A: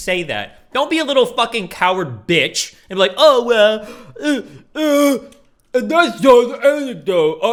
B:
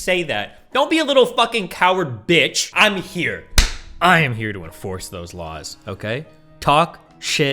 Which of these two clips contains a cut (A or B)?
B